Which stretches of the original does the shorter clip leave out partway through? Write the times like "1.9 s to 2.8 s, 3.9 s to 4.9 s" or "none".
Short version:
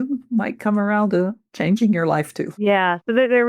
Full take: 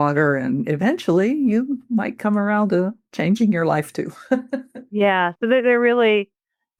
4.0 s to 4.8 s